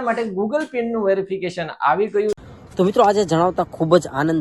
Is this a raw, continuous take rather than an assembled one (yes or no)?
no